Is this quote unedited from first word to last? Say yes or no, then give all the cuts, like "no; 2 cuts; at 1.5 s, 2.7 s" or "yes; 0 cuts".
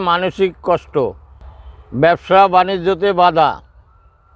yes; 0 cuts